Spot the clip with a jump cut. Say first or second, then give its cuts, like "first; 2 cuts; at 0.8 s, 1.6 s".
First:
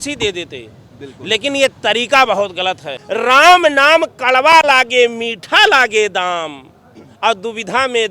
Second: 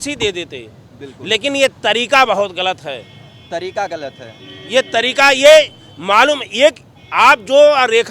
first; 1 cut; at 2.9 s